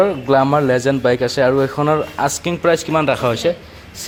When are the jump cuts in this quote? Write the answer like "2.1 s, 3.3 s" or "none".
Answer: none